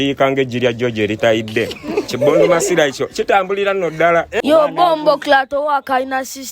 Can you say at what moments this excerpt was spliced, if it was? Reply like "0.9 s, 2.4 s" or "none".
4.3 s